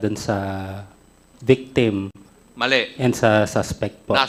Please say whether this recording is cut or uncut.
uncut